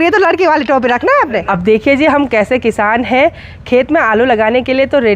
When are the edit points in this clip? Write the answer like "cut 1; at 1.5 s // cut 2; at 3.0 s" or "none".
cut 1; at 1.4 s